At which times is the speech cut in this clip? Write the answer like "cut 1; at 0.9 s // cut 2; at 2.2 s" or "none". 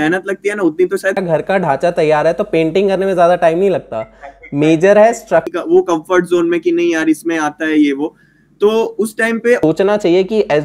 cut 1; at 1.2 s // cut 2; at 5.5 s // cut 3; at 9.6 s